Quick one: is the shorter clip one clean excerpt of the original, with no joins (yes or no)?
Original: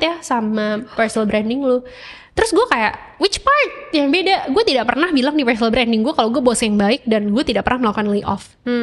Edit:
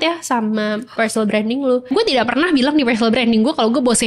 no